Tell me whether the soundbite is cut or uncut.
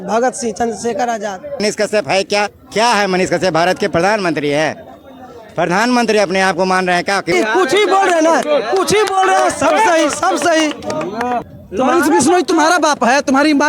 cut